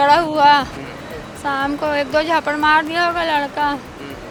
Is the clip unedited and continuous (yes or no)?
yes